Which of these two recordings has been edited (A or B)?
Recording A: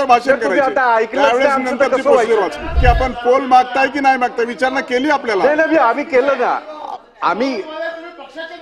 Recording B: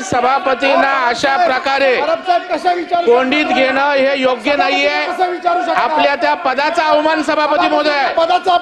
A